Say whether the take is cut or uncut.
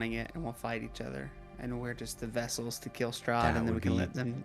uncut